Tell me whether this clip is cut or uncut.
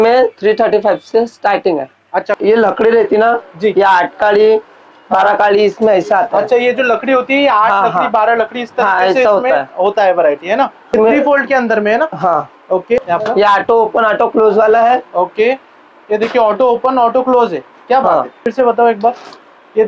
cut